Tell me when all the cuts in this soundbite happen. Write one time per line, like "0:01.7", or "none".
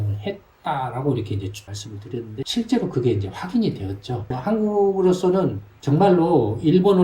0:01.8
0:04.3